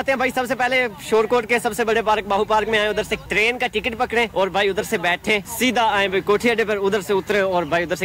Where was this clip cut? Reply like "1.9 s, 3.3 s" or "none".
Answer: none